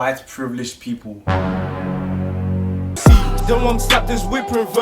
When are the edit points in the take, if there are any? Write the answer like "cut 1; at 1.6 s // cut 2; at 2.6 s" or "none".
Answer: cut 1; at 2.9 s